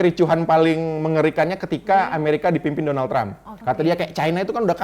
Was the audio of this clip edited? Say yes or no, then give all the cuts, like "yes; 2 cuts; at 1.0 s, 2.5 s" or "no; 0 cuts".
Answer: yes; 1 cut; at 3.5 s